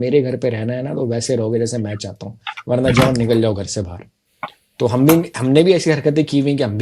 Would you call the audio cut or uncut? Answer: uncut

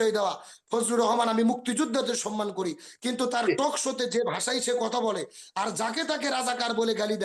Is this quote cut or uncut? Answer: uncut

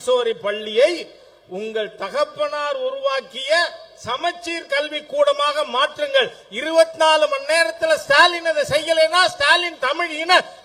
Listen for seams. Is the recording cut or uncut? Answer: uncut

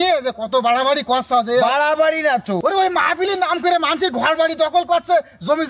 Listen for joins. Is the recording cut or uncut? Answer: cut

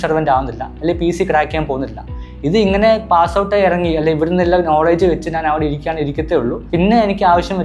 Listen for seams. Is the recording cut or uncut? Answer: uncut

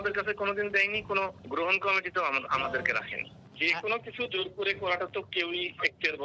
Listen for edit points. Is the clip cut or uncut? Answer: uncut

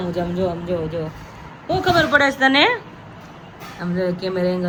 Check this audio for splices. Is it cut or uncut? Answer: uncut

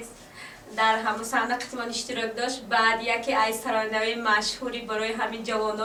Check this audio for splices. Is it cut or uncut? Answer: uncut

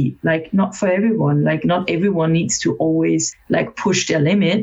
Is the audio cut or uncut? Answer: cut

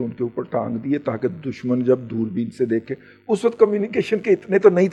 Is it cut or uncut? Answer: uncut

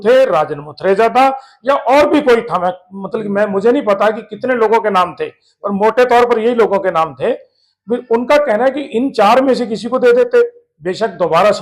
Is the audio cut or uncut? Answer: uncut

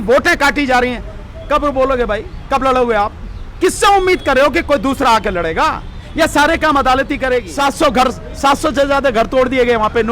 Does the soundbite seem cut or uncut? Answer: cut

